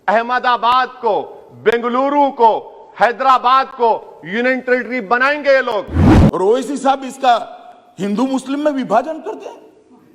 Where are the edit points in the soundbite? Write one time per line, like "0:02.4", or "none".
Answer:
0:06.0